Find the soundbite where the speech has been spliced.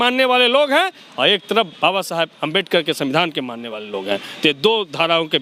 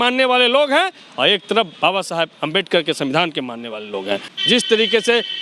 second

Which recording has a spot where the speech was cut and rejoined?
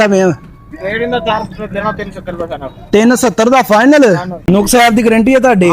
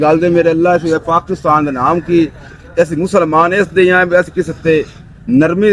first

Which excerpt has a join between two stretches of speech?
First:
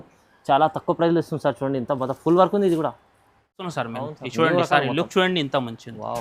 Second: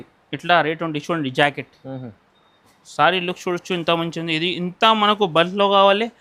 first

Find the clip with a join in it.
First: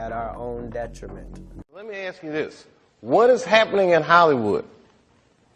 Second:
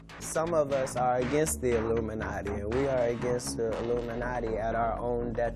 first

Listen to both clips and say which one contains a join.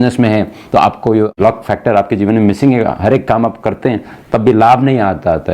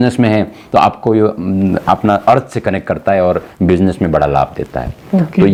first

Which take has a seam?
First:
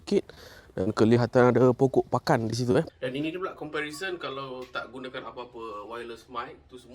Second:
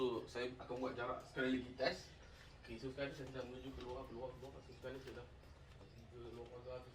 first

